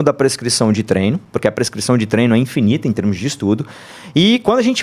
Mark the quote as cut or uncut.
cut